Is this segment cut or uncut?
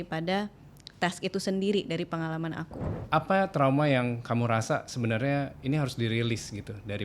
cut